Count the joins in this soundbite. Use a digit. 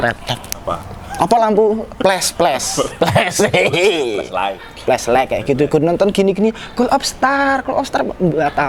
0